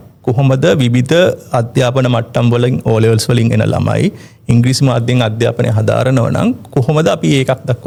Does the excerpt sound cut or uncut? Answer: uncut